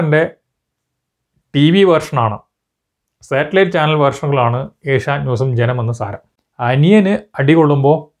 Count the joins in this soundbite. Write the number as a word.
one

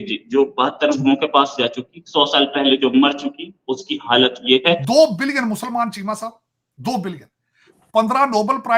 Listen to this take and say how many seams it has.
one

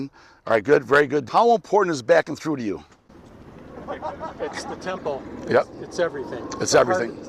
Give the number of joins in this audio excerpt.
one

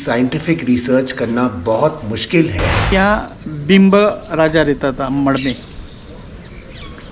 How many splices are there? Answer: one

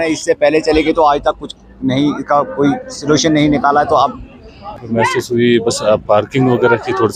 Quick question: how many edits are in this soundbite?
one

